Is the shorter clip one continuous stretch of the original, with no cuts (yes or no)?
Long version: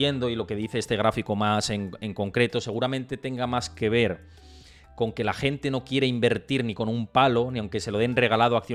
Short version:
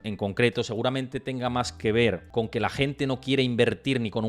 no